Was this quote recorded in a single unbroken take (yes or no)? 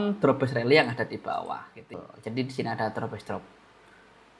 no